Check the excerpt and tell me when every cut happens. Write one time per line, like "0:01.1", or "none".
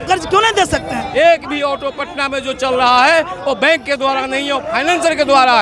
0:01.0